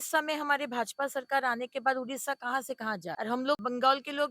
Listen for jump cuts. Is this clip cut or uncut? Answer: cut